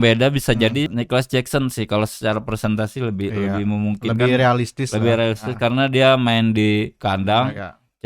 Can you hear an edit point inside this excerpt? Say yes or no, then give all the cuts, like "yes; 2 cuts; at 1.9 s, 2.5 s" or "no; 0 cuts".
yes; 1 cut; at 0.9 s